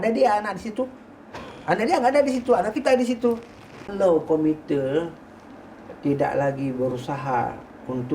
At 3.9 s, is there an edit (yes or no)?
yes